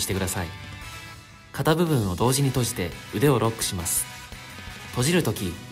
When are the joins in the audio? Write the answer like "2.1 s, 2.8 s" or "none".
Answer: none